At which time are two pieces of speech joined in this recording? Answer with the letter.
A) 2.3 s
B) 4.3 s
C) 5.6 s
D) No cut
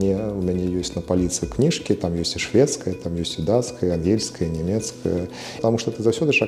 C